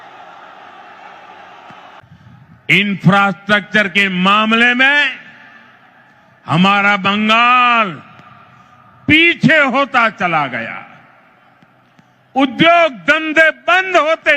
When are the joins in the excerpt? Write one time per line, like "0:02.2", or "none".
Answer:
0:02.0